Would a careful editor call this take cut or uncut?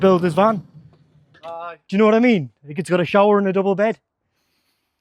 uncut